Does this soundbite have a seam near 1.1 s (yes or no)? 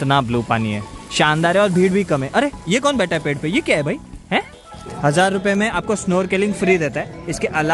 no